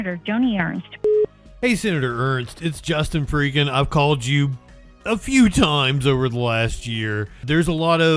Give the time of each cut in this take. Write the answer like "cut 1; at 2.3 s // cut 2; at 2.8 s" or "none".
cut 1; at 1.0 s // cut 2; at 7.4 s